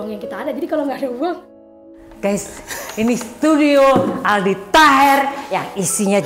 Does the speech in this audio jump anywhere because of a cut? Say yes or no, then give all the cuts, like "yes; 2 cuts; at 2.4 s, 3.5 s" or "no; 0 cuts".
yes; 1 cut; at 1.6 s